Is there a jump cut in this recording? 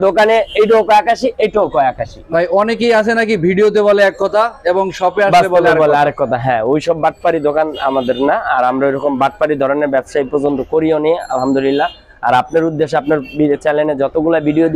yes; 1 cut; at 2.1 s

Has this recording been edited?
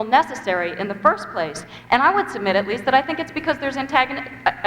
yes; 1 cut; at 1.2 s

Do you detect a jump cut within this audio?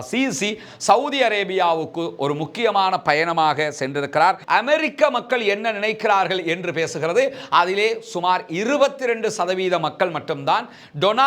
yes; 1 cut; at 4.4 s

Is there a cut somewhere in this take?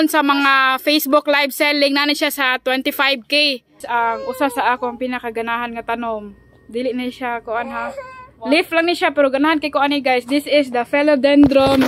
yes; 1 cut; at 3.8 s

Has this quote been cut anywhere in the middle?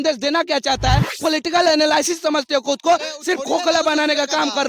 yes; 1 cut; at 1.1 s

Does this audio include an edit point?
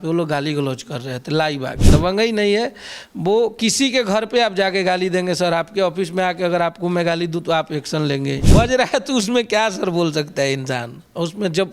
yes; 2 cuts; at 1.8 s, 8.4 s

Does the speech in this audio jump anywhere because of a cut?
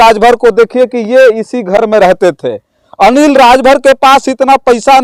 no; 0 cuts

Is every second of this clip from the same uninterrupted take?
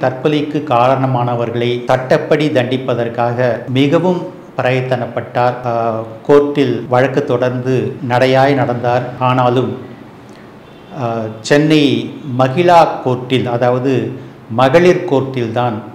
no; 6 cuts; at 1.8 s, 3.6 s, 5.6 s, 6.8 s, 8.0 s, 9.1 s

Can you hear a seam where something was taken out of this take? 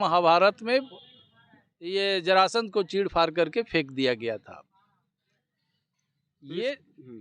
no; 0 cuts

